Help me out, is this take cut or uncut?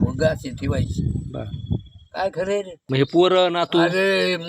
cut